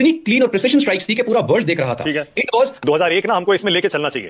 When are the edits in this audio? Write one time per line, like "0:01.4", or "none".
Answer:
0:02.8